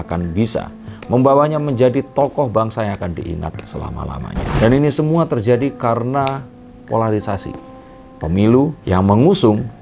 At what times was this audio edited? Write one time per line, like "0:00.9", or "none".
0:04.5